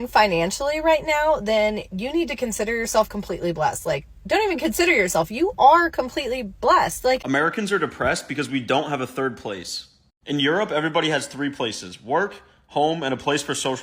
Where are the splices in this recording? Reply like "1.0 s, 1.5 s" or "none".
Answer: 7.2 s